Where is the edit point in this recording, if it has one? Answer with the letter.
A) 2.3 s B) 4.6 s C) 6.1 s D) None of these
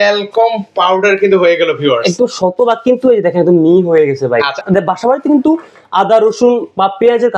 B